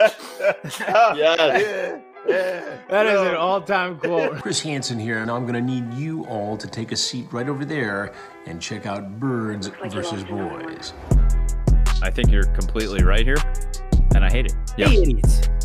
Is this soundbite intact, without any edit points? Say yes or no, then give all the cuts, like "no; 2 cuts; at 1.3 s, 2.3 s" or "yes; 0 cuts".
no; 1 cut; at 4.4 s